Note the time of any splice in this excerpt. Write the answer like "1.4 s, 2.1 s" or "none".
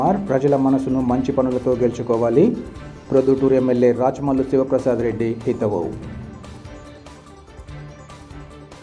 none